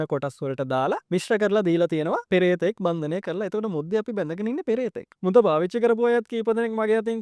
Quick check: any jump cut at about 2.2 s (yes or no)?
yes